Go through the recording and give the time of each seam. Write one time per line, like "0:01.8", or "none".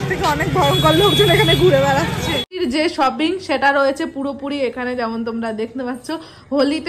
0:02.6